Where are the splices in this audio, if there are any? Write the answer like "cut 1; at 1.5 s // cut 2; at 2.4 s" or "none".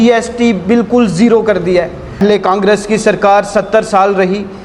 cut 1; at 2.2 s